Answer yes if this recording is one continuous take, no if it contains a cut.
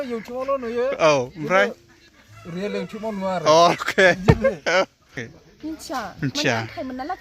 no